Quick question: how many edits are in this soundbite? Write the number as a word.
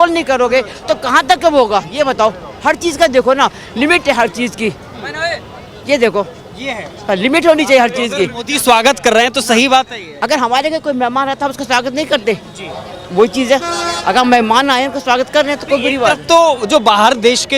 zero